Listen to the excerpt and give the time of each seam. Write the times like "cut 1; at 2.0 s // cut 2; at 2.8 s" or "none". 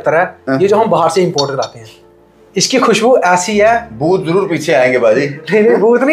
none

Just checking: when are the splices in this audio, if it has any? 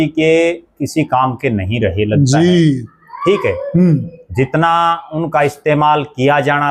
none

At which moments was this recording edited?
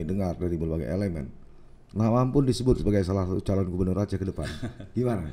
none

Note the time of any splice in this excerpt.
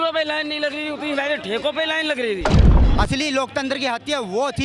cut 1; at 2.8 s

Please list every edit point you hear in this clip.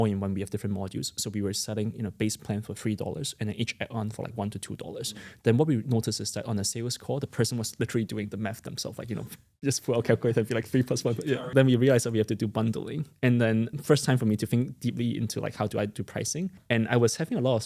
cut 1; at 11.4 s // cut 2; at 13.7 s // cut 3; at 16.6 s

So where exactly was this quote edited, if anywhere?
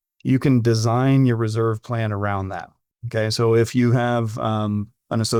none

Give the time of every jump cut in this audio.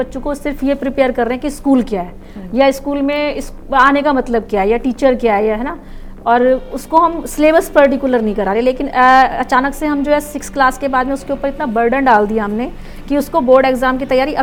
none

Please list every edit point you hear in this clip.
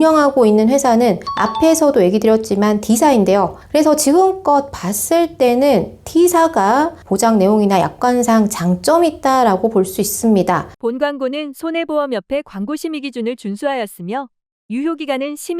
cut 1; at 10.7 s

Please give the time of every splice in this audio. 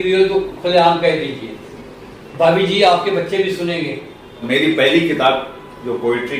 cut 1; at 4.4 s

